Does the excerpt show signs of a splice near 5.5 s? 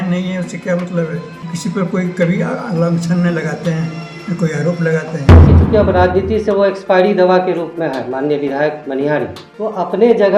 yes; 3 cuts; at 1.5 s, 5.5 s, 9.4 s

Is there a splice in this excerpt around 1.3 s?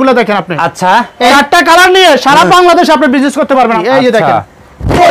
yes; 2 cuts; at 1.3 s, 3.8 s

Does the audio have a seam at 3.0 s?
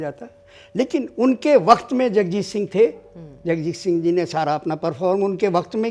no; 0 cuts

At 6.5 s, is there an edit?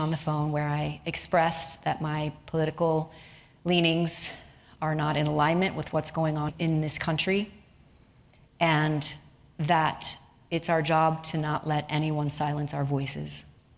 yes; 1 cut; at 6.5 s

